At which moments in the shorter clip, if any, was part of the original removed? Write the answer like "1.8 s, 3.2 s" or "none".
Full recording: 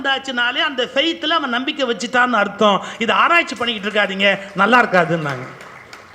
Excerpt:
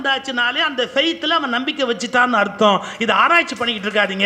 none